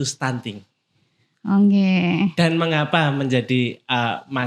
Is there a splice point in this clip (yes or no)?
no